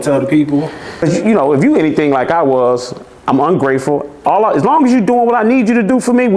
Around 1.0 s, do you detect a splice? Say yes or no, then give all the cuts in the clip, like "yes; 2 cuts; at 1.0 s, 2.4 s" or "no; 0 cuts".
yes; 1 cut; at 1.0 s